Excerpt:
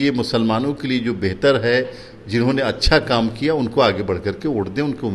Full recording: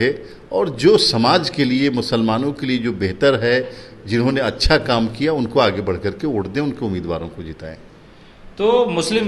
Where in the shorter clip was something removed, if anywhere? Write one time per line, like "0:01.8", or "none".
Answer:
none